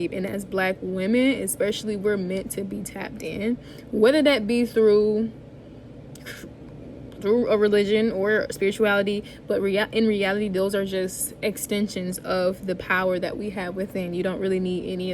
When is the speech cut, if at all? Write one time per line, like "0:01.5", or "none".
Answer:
none